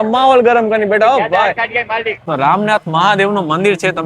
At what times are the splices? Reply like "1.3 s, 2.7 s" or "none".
2.2 s